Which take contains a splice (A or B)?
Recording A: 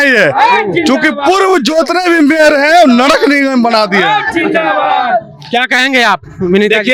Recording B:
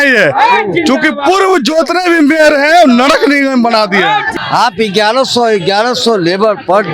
B